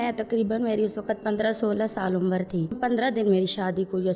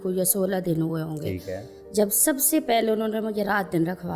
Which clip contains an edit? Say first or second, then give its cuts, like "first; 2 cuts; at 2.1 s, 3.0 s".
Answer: first; 1 cut; at 2.8 s